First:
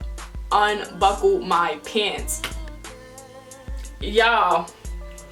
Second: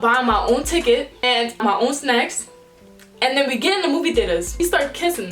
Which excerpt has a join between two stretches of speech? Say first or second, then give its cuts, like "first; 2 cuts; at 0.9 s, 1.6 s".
second; 2 cuts; at 1.6 s, 4.6 s